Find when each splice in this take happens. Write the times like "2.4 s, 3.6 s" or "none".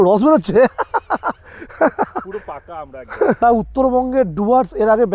3.4 s

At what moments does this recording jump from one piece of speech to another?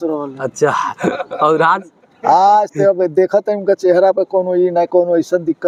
none

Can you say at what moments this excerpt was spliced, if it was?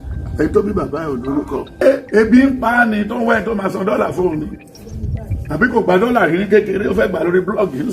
1.8 s

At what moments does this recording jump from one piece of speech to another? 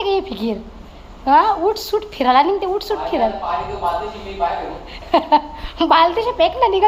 none

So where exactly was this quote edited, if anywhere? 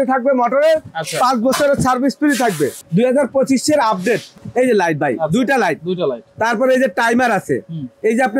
2.8 s, 4.4 s

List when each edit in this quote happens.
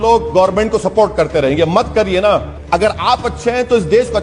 2.5 s

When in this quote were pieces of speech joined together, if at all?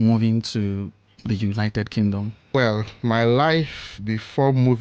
2.5 s

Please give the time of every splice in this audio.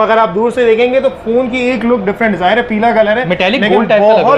none

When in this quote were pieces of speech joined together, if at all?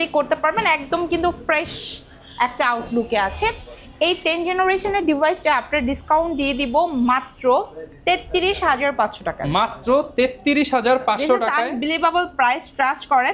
none

